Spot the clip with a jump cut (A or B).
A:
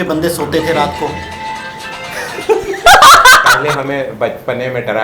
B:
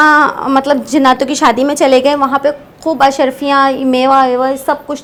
A